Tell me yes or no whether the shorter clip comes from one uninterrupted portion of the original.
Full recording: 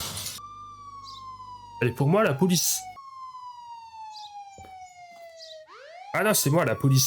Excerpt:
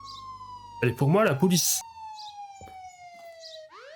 no